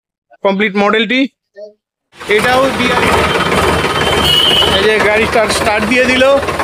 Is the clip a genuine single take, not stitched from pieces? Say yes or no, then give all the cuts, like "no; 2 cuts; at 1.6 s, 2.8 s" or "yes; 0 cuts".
no; 1 cut; at 2.8 s